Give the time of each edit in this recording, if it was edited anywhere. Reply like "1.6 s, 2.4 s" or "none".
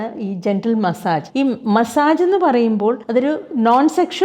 1.3 s, 3.0 s